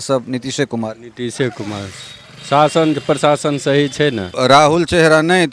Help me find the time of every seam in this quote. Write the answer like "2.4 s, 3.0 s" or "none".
4.3 s